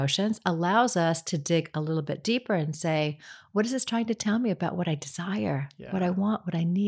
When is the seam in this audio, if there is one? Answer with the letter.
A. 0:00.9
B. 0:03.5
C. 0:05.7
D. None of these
D